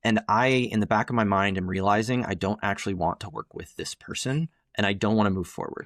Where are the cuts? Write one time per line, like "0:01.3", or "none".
none